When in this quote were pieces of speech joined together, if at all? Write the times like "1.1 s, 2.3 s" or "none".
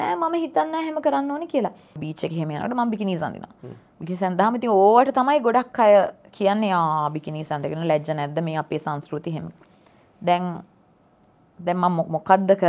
2.1 s